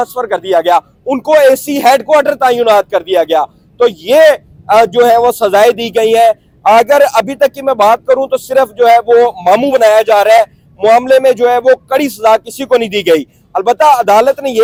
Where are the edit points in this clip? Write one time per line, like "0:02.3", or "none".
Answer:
none